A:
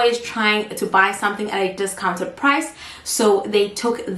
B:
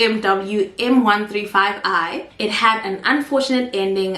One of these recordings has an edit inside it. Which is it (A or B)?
B